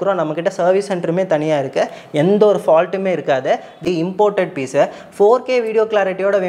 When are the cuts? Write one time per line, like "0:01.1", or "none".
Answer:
0:03.8